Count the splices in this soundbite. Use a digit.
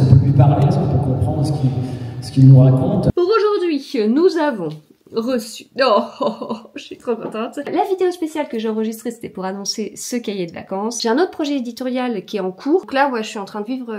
4